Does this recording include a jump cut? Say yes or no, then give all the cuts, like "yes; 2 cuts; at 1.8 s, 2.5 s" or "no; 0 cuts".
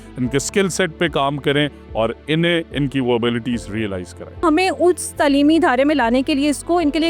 yes; 1 cut; at 4.4 s